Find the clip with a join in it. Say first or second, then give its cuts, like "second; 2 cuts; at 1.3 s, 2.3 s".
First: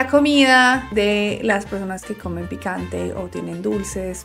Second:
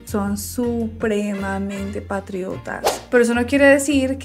second; 1 cut; at 2.9 s